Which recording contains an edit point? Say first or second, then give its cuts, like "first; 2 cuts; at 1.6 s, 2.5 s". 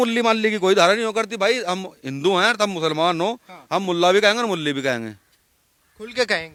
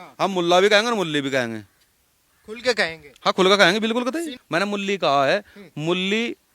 second; 1 cut; at 4.3 s